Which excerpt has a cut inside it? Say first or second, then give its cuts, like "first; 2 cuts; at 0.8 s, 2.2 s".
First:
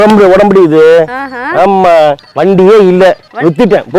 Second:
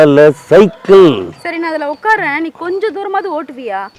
first; 1 cut; at 2.3 s